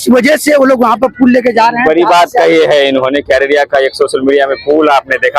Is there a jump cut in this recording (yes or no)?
no